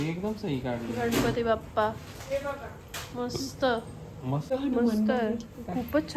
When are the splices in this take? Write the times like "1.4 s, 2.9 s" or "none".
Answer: 4.4 s